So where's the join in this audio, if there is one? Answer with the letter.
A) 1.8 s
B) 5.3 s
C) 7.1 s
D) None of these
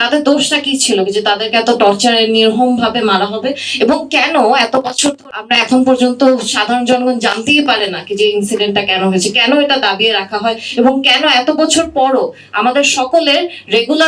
B